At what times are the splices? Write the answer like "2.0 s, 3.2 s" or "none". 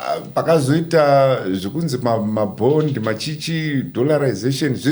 none